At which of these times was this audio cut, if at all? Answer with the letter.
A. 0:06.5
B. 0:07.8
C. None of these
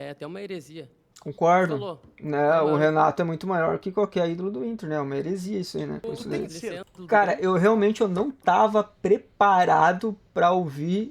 A